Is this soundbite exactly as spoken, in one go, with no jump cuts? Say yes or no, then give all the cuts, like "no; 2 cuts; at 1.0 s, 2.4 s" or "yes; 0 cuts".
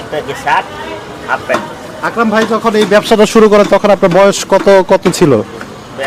yes; 0 cuts